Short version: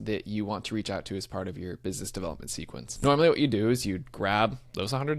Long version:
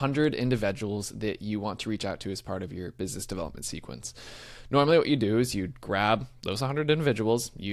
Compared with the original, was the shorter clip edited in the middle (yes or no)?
yes